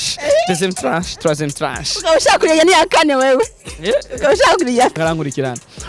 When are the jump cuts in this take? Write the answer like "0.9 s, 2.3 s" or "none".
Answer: 5.0 s